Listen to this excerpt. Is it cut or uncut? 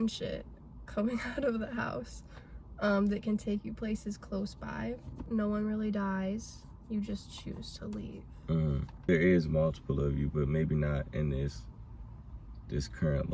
cut